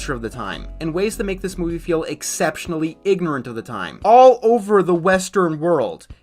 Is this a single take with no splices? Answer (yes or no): no